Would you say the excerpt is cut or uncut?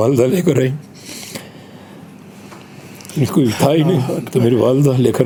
uncut